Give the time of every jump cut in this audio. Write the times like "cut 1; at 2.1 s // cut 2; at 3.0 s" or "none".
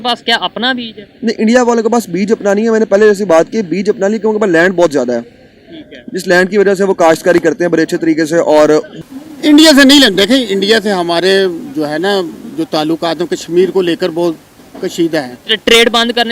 cut 1; at 8.9 s